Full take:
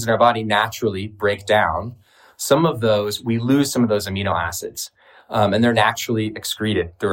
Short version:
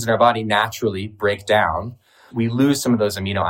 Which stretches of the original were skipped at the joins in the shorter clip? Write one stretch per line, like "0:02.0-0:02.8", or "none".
0:02.3-0:03.2